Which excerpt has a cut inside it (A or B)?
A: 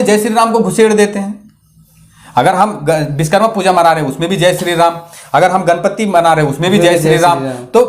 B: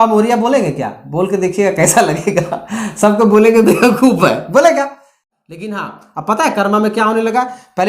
B